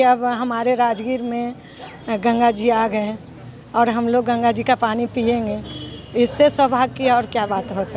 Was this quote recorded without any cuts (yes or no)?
yes